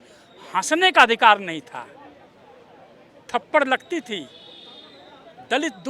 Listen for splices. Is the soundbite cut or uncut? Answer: uncut